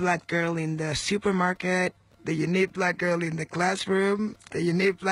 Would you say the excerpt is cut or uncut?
uncut